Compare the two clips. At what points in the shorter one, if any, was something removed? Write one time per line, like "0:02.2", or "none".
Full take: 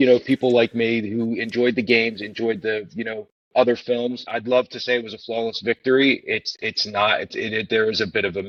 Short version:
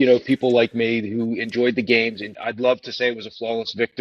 0:02.3